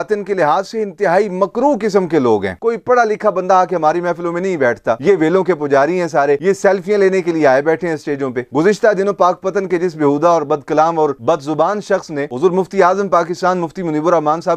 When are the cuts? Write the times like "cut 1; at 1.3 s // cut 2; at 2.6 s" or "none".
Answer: cut 1; at 2.5 s // cut 2; at 5.0 s // cut 3; at 8.5 s

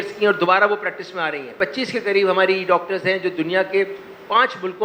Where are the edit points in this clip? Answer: none

